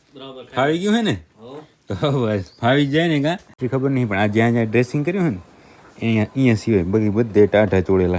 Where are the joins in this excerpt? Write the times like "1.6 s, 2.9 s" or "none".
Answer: 3.5 s